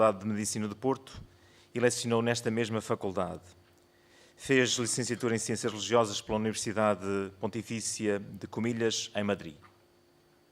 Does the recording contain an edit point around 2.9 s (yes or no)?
no